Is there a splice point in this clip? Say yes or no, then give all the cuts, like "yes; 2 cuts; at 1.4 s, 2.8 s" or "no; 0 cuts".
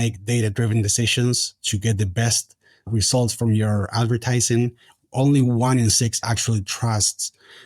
yes; 1 cut; at 2.9 s